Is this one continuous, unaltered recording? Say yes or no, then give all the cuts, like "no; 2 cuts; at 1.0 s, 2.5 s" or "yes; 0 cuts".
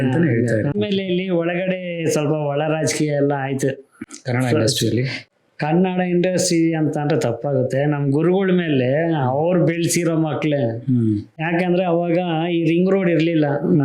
no; 2 cuts; at 0.7 s, 11.3 s